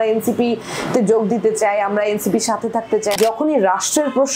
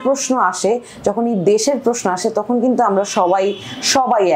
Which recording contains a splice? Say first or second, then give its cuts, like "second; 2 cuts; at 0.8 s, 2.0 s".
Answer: first; 1 cut; at 3.2 s